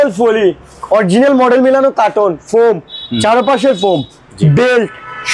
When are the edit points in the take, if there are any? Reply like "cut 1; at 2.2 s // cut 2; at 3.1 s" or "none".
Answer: none